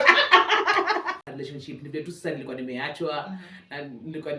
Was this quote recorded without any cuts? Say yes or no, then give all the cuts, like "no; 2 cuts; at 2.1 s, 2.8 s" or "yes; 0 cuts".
no; 1 cut; at 1.2 s